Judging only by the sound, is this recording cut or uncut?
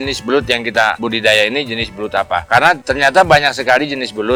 uncut